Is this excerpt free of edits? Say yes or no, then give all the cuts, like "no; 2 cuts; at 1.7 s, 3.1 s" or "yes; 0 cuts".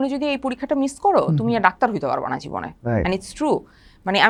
yes; 0 cuts